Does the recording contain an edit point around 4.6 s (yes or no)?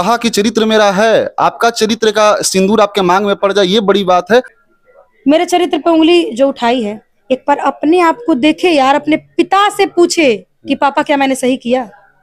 yes